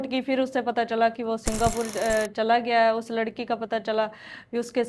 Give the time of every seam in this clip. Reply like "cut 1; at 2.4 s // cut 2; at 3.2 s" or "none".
none